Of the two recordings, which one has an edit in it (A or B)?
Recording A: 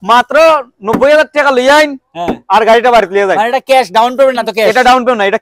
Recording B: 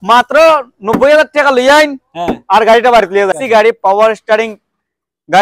B